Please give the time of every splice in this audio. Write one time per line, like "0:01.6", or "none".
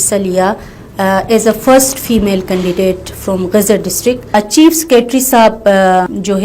0:04.3

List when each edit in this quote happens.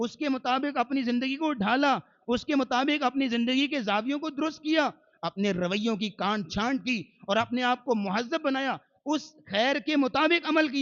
none

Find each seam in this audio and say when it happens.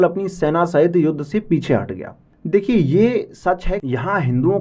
0:03.7

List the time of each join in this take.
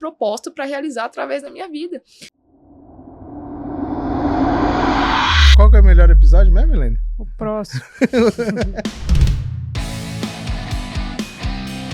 0:02.2

